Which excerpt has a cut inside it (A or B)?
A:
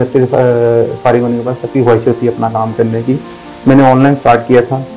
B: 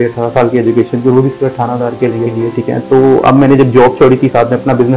B